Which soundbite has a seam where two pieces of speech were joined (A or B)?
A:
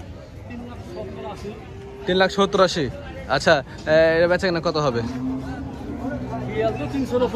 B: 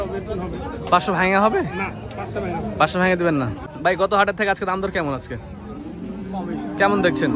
B